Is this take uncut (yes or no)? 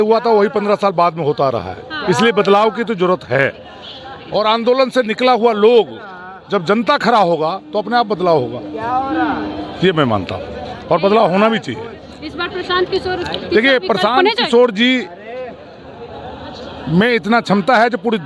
yes